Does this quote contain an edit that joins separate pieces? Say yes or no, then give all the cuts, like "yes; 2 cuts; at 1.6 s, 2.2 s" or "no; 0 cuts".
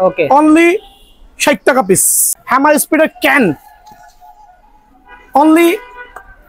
yes; 1 cut; at 2.2 s